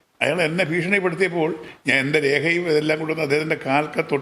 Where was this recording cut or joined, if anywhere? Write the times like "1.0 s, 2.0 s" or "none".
1.7 s